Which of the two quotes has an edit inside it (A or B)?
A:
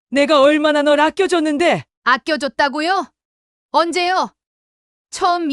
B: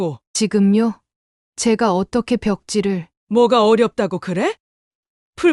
B